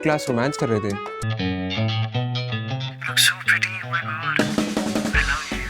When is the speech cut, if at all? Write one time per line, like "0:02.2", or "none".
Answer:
0:01.2

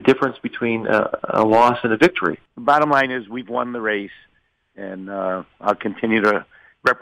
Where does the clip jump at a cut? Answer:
0:02.4

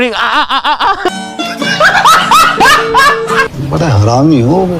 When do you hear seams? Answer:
0:01.1

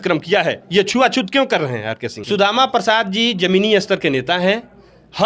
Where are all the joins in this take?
0:02.2

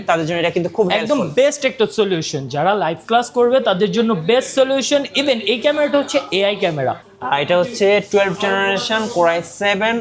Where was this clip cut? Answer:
0:07.1

